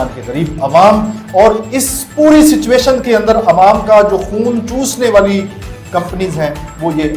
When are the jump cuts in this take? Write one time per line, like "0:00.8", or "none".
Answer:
none